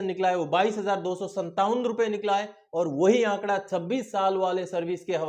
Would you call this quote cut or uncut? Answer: uncut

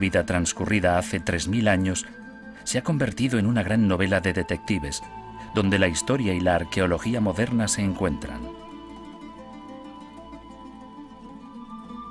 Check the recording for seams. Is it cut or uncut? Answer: uncut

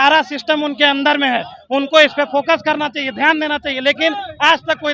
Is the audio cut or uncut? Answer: uncut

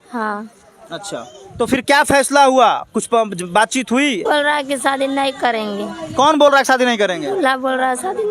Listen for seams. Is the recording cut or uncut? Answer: cut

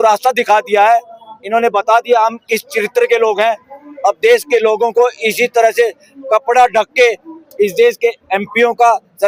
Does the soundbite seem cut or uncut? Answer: uncut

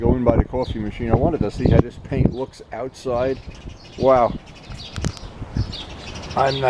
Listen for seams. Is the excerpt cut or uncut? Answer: uncut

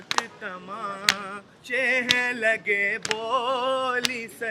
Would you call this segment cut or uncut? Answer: uncut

